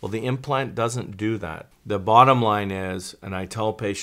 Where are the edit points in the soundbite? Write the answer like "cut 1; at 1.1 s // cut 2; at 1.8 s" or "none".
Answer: cut 1; at 1.8 s